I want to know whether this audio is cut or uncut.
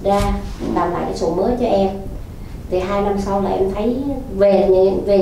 uncut